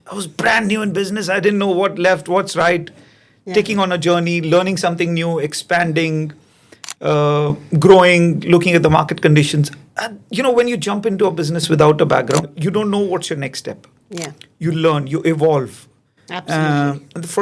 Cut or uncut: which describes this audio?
cut